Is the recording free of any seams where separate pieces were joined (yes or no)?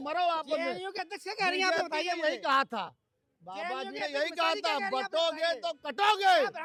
yes